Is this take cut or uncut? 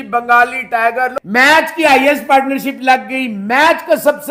uncut